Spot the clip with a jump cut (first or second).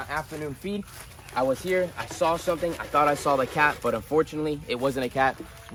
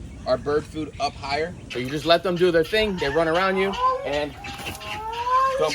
second